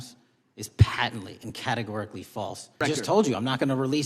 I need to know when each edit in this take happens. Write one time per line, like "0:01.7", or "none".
0:02.8